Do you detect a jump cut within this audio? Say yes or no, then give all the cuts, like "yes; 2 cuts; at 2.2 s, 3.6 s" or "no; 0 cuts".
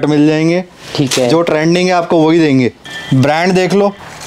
yes; 1 cut; at 2.8 s